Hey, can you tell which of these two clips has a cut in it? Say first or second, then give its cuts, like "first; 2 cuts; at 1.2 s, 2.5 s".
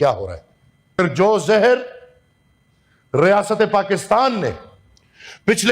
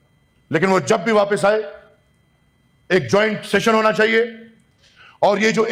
first; 1 cut; at 1.0 s